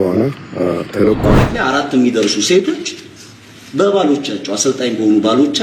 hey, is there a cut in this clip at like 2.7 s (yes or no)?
no